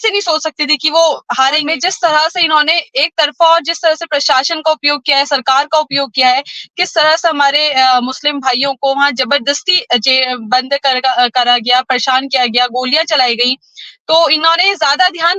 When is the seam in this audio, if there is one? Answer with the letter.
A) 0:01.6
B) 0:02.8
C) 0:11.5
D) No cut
A